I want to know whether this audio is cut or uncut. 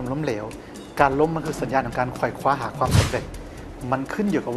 uncut